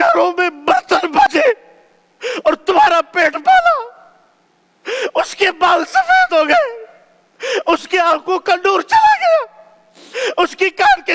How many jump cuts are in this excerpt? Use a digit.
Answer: 1